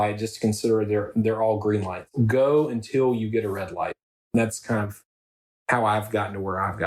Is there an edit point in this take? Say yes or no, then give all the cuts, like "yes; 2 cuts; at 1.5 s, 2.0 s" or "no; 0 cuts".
no; 0 cuts